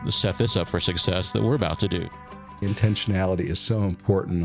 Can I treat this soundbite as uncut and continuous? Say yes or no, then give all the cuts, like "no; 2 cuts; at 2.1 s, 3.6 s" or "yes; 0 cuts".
no; 1 cut; at 2.6 s